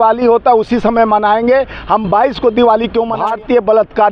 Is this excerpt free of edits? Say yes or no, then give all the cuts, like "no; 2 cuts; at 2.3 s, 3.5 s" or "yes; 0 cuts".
no; 1 cut; at 3.1 s